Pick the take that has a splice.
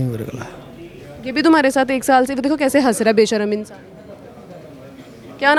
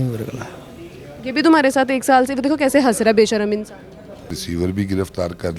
second; 1 cut; at 4.4 s

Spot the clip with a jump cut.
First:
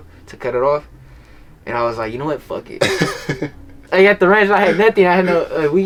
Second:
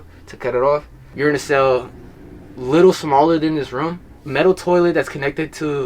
second; 2 cuts; at 1.0 s, 4.2 s

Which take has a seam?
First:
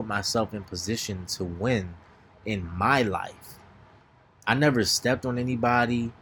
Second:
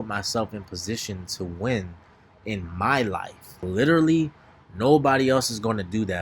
second; 1 cut; at 3.6 s

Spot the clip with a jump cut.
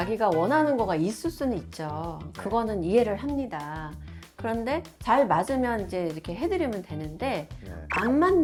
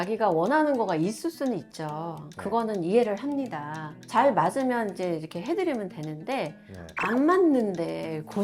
second; 1 cut; at 4.0 s

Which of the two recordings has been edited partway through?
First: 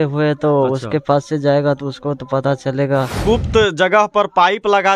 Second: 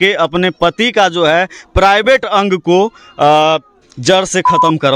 first; 1 cut; at 3.2 s

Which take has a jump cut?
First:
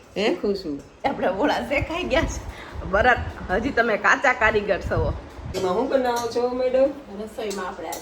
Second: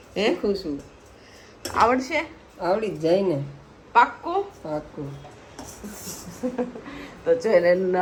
first; 2 cuts; at 1.0 s, 5.6 s

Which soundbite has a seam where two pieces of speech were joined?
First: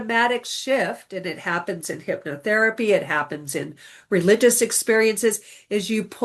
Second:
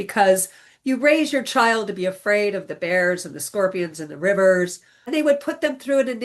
second; 1 cut; at 5.1 s

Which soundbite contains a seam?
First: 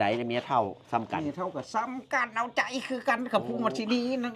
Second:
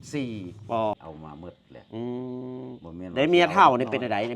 second; 1 cut; at 1.0 s

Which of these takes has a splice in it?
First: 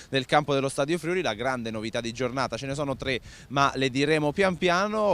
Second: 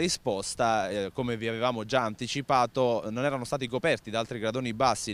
first; 1 cut; at 1.5 s

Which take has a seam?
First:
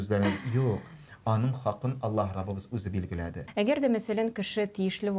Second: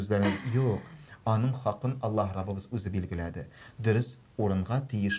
first; 1 cut; at 3.4 s

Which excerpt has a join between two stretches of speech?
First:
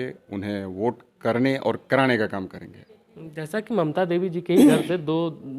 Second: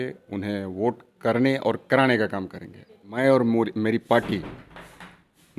second; 1 cut; at 3.0 s

